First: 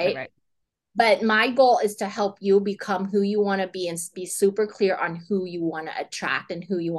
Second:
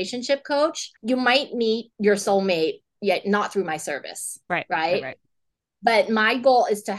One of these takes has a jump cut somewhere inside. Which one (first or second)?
second